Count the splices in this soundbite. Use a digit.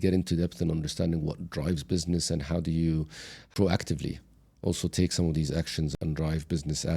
2